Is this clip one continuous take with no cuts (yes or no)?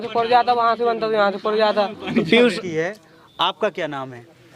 no